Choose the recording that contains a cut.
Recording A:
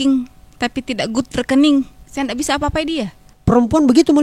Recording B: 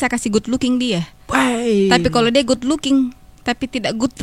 A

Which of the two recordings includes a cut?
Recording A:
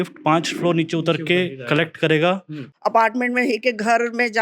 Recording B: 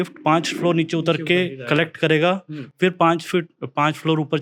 A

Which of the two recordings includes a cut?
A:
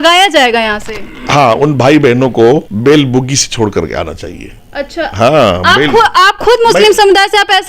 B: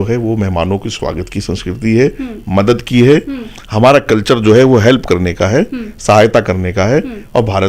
A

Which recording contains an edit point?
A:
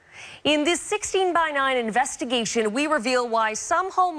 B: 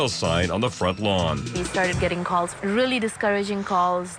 A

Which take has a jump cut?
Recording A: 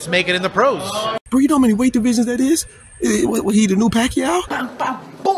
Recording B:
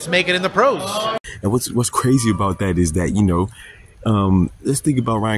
A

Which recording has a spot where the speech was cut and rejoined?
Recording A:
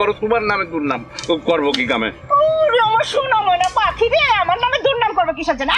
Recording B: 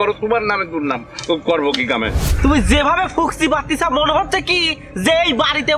B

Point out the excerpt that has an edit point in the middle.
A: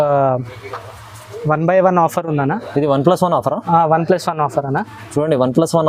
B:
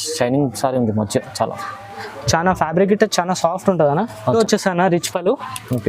B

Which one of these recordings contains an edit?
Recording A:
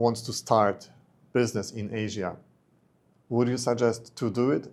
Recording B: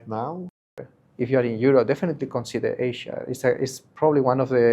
B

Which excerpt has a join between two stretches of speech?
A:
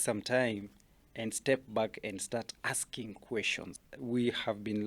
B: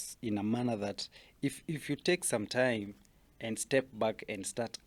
A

